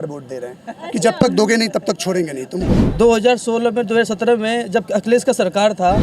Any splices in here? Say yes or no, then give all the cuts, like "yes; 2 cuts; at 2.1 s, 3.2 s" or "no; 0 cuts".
yes; 1 cut; at 2.8 s